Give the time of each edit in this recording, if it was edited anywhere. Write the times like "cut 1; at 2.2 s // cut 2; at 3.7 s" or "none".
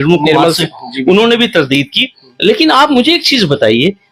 none